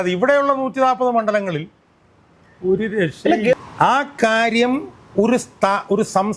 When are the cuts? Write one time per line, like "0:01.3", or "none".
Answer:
0:03.5